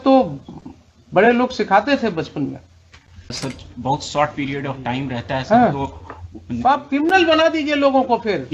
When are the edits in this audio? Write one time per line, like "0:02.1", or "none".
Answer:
0:03.4